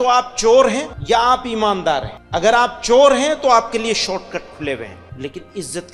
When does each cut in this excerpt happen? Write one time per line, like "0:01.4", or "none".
0:00.9
0:02.2
0:05.0